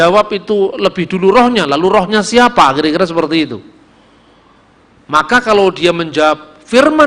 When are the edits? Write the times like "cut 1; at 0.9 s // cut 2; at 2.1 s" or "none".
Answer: none